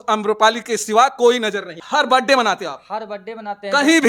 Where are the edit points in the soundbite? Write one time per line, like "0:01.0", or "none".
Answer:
0:01.8